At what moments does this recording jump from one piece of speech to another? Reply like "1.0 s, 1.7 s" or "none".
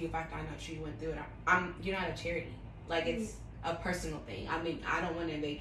none

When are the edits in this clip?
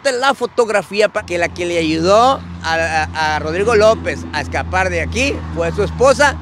1.1 s

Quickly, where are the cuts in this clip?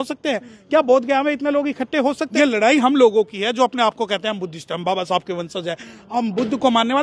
2.2 s

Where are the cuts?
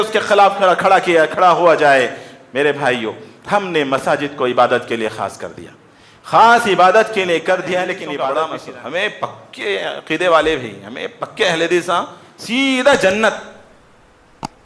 8.0 s

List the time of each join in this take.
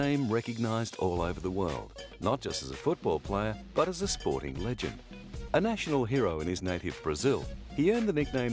none

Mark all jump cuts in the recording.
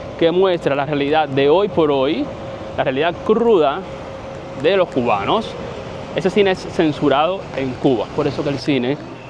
8.1 s

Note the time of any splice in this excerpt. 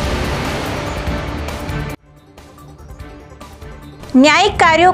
3.6 s

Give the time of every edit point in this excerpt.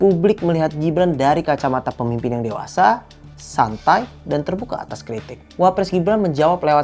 none

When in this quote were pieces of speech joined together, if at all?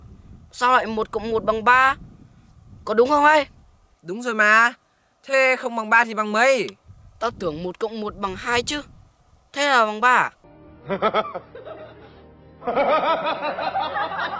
none

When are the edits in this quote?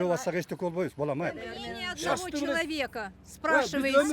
1.5 s

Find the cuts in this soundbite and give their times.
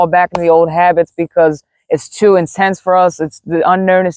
none

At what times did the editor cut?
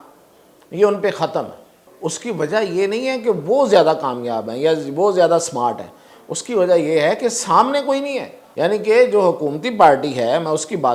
1.8 s, 8.4 s

